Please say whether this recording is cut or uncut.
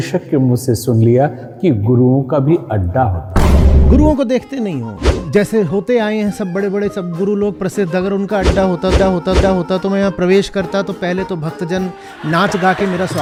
uncut